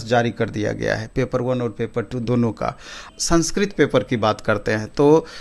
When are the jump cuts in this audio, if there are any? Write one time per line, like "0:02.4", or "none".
0:03.1

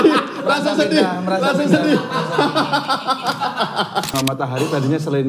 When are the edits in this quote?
0:04.1

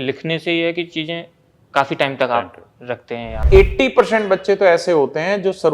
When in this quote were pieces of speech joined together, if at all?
0:03.4

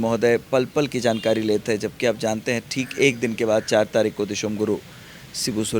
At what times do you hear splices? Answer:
none

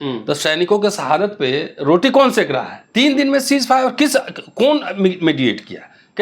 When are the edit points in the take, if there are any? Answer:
0:02.8

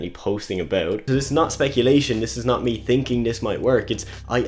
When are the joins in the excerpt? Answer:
0:01.0

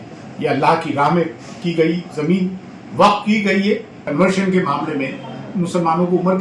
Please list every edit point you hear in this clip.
0:04.0

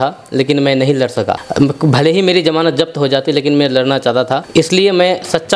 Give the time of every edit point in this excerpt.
none

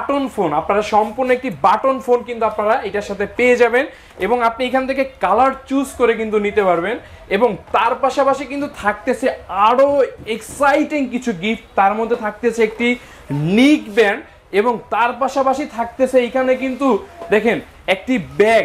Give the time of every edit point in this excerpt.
none

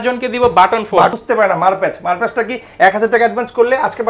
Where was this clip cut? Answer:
0:01.1

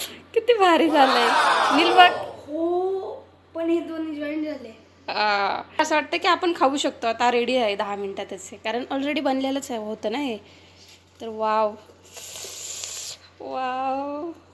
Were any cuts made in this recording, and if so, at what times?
none

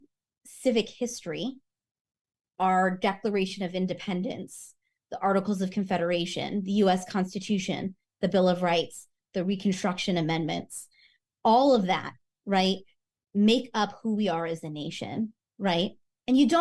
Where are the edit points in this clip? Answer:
none

